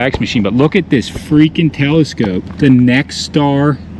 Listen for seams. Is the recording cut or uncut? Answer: cut